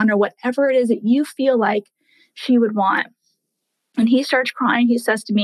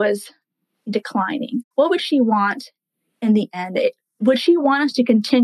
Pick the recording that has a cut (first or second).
second